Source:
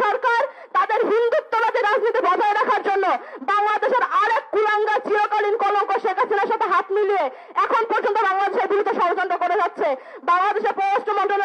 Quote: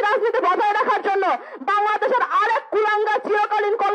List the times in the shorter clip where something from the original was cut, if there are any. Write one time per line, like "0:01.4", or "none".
none

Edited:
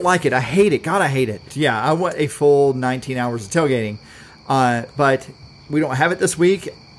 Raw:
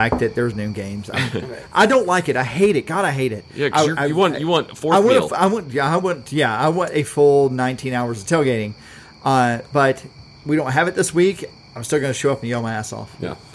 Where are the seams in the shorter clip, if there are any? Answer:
0:01.5

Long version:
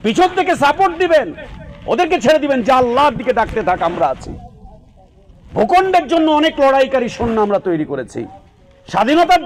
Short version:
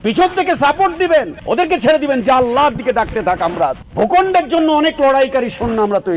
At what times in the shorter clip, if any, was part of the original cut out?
0:01.4
0:03.8

